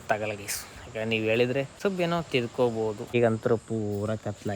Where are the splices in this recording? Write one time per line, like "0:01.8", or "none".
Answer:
0:01.7
0:03.1